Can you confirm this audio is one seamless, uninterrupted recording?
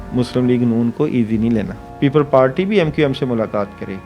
no; 1 cut; at 1.8 s

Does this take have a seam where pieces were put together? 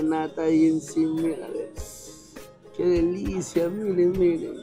no; 0 cuts

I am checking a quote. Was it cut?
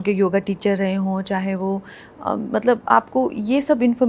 no; 0 cuts

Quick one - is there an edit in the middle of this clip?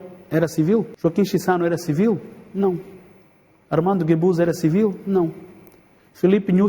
yes; 1 cut; at 0.9 s

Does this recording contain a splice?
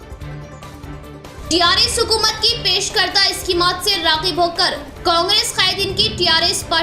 yes; 1 cut; at 1.1 s

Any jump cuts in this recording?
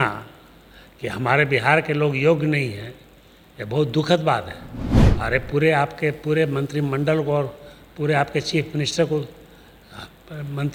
no; 0 cuts

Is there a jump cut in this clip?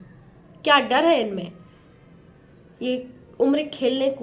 no; 0 cuts

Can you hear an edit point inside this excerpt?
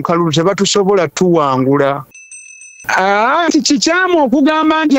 yes; 1 cut; at 2.7 s

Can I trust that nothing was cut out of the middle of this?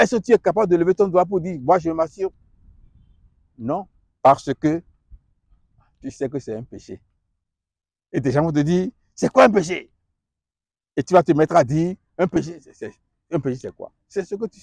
yes; 0 cuts

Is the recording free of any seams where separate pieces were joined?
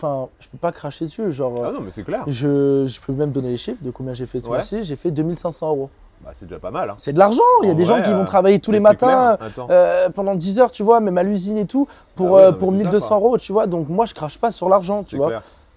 yes; 0 cuts

